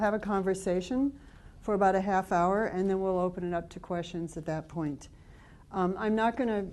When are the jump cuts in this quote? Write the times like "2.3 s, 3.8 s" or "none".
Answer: 3.3 s

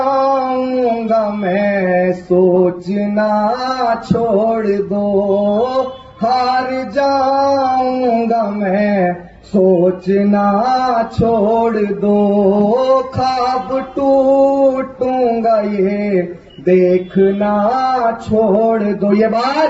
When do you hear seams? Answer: none

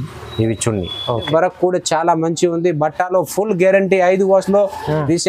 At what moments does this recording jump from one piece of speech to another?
1.3 s

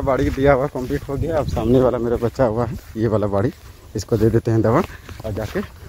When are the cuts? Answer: none

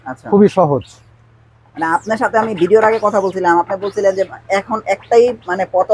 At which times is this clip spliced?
none

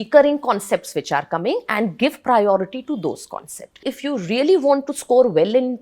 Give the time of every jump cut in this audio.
3.9 s

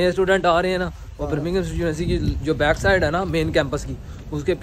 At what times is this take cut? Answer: none

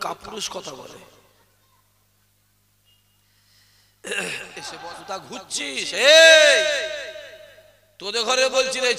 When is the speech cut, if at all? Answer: 4.7 s

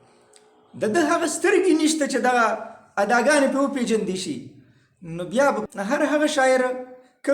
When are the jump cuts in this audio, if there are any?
5.7 s

